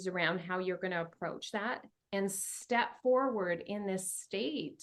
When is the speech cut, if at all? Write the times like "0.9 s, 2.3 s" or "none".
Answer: none